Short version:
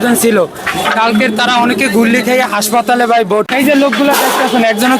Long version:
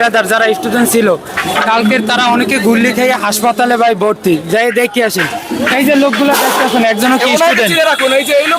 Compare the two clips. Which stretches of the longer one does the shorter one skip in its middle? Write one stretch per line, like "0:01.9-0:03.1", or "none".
0:04.2-0:05.7